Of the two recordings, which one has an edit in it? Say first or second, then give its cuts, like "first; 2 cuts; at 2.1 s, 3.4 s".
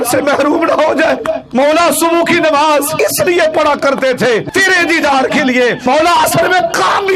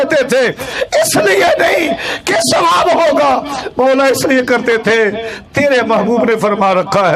first; 4 cuts; at 1.4 s, 2.9 s, 4.5 s, 5.8 s